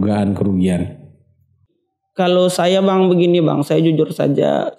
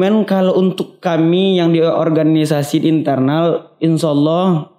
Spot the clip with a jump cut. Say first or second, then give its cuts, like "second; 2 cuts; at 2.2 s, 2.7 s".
first; 1 cut; at 1.6 s